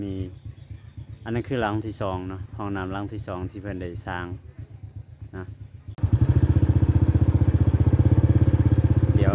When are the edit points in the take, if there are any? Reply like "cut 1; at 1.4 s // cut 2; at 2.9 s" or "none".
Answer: cut 1; at 5.9 s